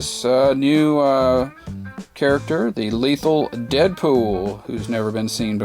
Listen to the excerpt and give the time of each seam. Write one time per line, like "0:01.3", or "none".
none